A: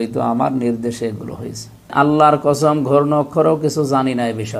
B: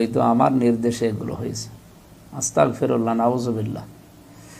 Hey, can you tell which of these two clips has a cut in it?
A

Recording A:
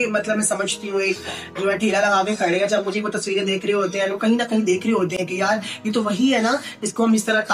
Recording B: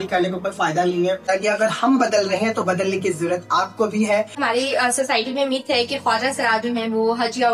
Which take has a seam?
B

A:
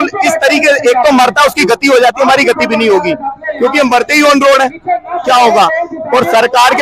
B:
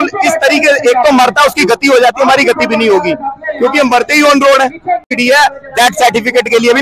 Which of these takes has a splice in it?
B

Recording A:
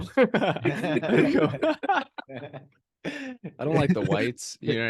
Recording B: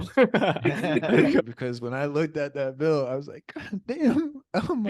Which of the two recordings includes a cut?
B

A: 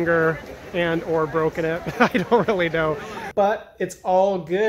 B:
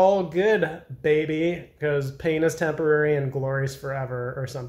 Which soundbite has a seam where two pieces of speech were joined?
A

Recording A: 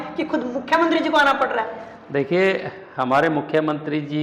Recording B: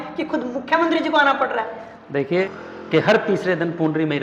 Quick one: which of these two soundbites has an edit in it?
B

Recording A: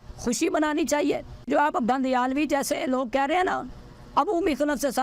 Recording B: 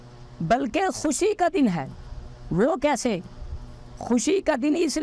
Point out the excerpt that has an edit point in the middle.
A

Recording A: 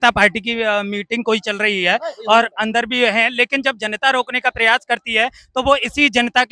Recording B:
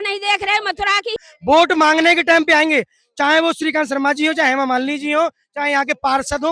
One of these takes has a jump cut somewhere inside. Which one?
B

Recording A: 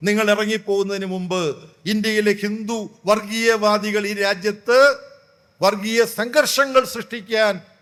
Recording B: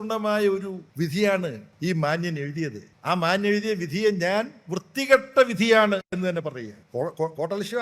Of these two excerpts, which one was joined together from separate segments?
B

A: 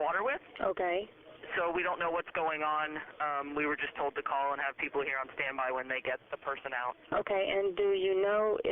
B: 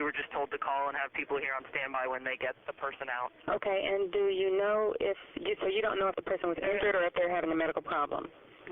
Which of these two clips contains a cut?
A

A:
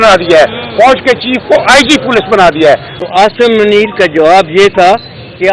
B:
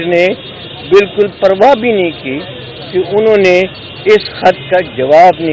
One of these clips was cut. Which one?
A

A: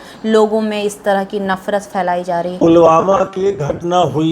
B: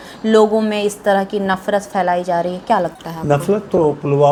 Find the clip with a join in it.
A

